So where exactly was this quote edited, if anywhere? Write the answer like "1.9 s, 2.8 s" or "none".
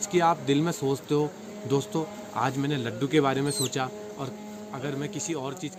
none